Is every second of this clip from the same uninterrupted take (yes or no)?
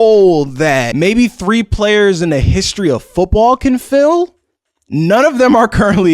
no